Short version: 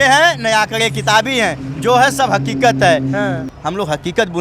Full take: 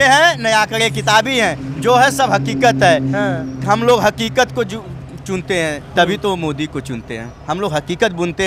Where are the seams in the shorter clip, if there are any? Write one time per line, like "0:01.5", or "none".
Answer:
0:03.5